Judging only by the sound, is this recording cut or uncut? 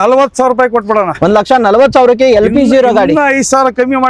uncut